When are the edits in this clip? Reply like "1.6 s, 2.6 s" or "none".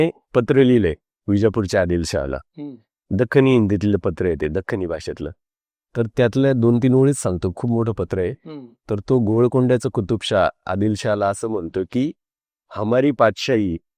none